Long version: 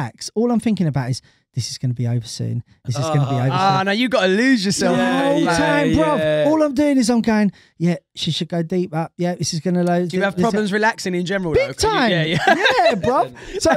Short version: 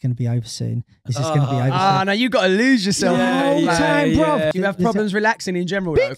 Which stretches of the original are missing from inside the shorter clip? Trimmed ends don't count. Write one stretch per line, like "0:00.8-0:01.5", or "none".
0:06.3-0:10.1